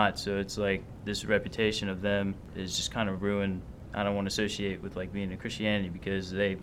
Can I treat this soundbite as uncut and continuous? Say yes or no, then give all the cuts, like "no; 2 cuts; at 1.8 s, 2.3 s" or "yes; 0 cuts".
no; 3 cuts; at 1.0 s, 2.5 s, 3.8 s